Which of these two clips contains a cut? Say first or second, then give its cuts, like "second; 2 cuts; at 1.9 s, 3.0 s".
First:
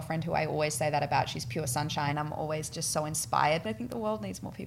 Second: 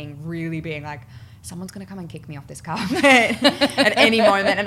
first; 2 cuts; at 2.1 s, 3.6 s